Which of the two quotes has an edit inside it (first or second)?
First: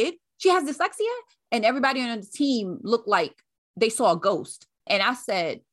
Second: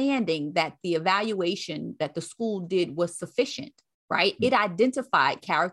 first